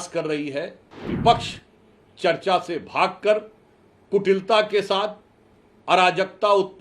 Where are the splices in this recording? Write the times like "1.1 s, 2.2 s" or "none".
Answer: 1.1 s